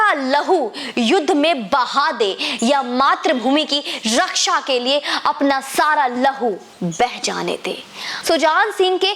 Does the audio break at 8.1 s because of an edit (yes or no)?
yes